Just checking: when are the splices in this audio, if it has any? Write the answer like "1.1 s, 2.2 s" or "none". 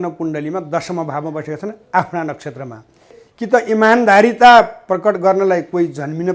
3.2 s